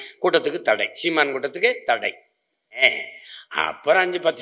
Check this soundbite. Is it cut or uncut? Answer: cut